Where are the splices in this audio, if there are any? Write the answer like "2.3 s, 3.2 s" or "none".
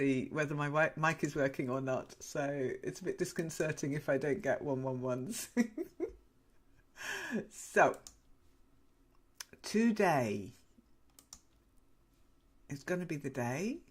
none